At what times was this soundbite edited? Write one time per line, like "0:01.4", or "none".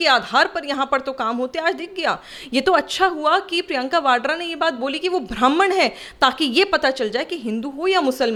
none